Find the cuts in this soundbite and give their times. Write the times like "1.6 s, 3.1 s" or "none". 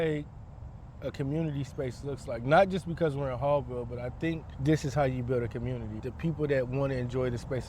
4.5 s, 6.1 s